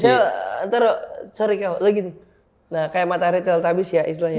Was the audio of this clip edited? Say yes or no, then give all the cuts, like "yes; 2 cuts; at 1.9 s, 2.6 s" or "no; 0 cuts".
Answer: no; 0 cuts